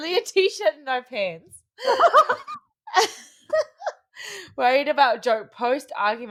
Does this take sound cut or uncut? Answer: uncut